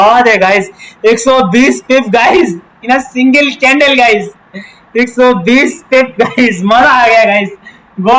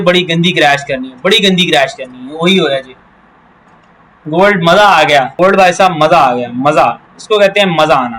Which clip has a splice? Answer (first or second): second